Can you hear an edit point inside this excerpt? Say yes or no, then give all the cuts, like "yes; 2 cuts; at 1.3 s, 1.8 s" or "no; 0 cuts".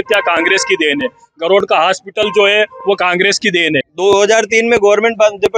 yes; 1 cut; at 3.9 s